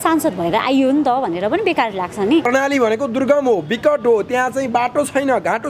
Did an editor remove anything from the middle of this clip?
yes; 1 cut; at 2.5 s

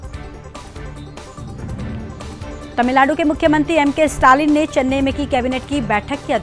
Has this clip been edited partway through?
yes; 1 cut; at 1.1 s

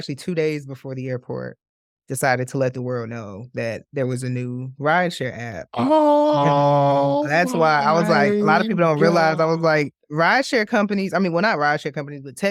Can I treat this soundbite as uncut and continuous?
yes; 0 cuts

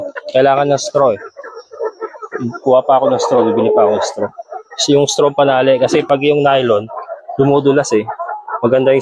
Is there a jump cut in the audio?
no; 0 cuts

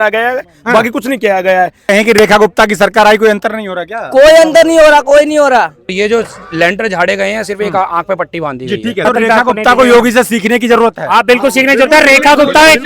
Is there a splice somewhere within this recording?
yes; 3 cuts; at 1.8 s, 5.9 s, 9.0 s

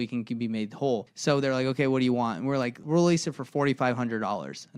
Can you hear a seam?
yes; 2 cuts; at 1.1 s, 2.8 s

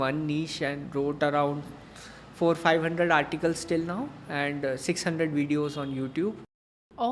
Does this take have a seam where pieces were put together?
no; 0 cuts

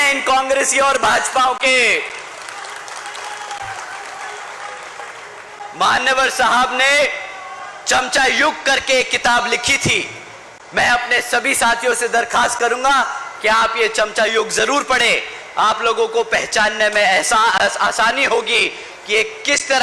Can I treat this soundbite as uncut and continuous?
yes; 0 cuts

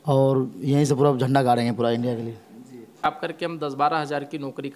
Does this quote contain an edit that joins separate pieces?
yes; 1 cut; at 3.0 s

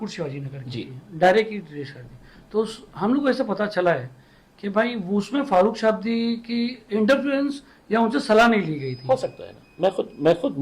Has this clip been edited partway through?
no; 0 cuts

